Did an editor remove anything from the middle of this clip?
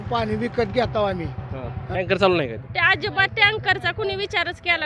yes; 1 cut; at 1.8 s

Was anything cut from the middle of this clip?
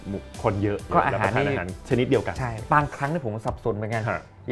yes; 3 cuts; at 0.9 s, 1.7 s, 2.5 s

